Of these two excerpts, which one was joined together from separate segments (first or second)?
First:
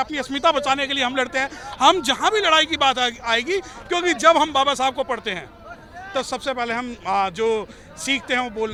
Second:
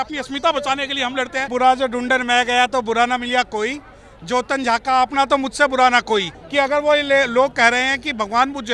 second